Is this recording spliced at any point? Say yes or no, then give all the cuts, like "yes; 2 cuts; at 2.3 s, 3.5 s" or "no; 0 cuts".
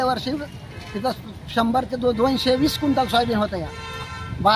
no; 0 cuts